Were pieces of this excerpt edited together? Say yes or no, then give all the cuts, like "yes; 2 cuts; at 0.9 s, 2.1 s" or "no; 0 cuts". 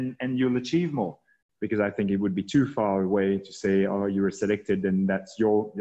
yes; 1 cut; at 1.4 s